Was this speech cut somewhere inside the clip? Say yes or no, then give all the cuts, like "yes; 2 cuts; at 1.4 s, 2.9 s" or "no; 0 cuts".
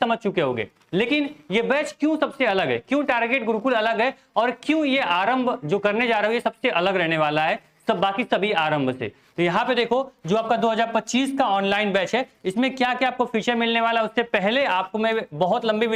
no; 0 cuts